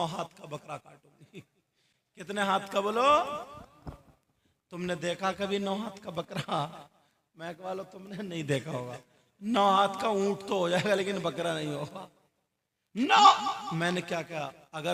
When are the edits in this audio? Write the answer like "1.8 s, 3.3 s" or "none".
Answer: none